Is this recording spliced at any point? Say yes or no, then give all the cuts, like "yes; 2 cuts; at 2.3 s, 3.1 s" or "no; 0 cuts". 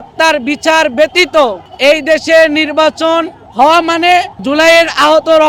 no; 0 cuts